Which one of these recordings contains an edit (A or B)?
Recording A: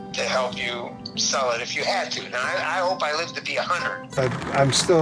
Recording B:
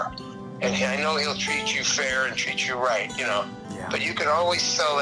A